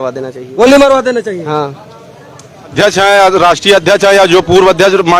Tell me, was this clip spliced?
yes; 1 cut; at 2.7 s

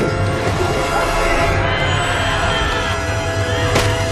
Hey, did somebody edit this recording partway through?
yes; 1 cut; at 1.8 s

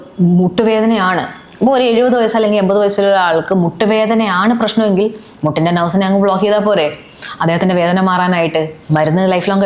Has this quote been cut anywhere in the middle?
no; 0 cuts

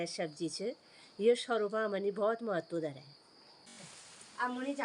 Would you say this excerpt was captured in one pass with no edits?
no; 1 cut; at 3.7 s

